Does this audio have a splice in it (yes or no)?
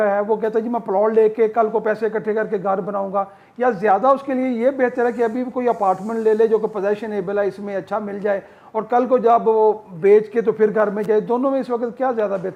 no